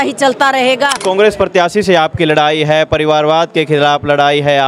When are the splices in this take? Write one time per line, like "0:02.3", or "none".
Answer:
0:01.0